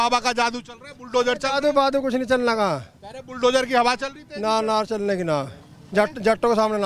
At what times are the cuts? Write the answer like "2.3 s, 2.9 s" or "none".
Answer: none